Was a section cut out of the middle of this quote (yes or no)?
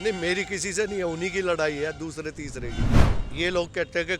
yes